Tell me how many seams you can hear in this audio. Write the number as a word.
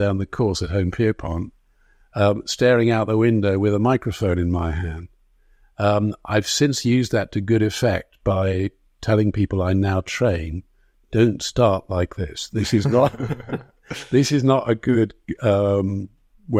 zero